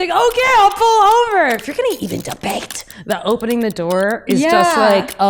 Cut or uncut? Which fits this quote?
cut